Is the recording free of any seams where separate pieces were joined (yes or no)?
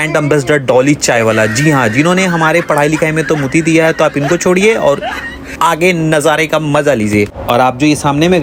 yes